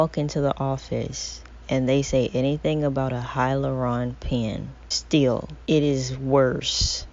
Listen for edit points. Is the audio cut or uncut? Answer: cut